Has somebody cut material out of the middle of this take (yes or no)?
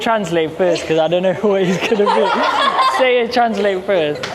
no